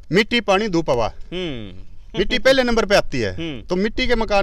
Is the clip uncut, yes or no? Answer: yes